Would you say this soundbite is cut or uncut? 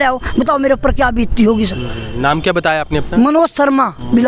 uncut